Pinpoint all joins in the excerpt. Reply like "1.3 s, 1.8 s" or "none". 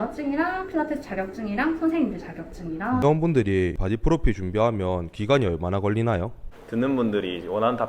3.0 s

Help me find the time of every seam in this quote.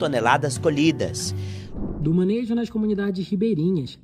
1.6 s

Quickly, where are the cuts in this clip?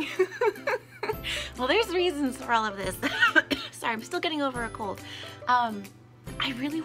none

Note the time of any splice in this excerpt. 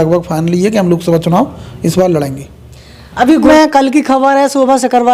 3.5 s

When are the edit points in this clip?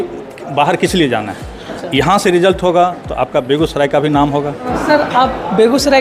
4.7 s

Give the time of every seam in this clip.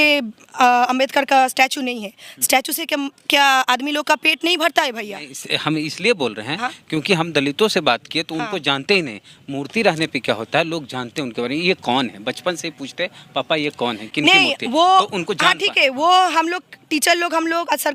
none

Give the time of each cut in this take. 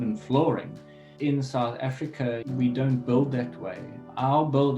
1.1 s

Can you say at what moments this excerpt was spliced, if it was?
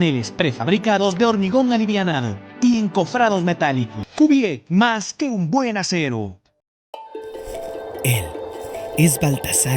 4.0 s, 6.7 s

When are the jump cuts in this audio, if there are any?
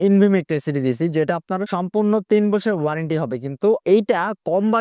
3.8 s

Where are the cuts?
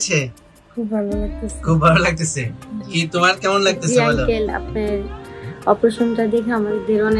none

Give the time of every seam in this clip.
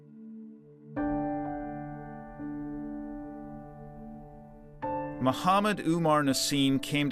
4.2 s

